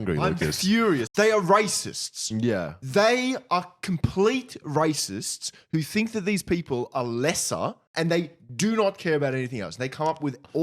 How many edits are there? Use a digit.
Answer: 2